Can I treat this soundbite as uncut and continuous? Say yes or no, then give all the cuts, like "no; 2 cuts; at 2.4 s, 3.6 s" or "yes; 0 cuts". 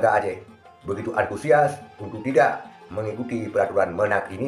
yes; 0 cuts